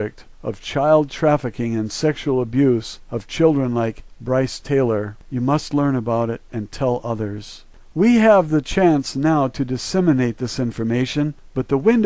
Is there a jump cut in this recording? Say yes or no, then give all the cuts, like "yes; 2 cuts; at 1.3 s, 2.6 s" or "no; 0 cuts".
no; 0 cuts